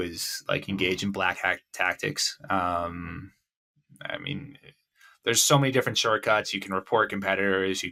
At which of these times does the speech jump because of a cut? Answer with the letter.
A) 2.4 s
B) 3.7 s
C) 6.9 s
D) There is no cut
D